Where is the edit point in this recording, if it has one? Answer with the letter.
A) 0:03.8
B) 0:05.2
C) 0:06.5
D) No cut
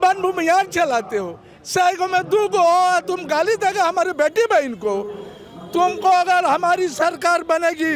D